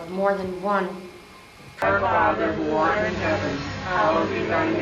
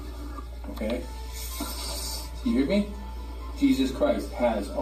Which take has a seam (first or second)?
first